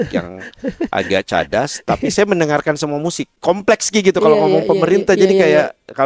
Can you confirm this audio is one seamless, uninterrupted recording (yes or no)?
no